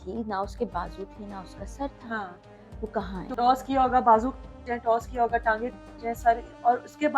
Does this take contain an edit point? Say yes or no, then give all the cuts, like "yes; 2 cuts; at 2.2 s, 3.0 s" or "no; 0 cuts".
yes; 1 cut; at 3.3 s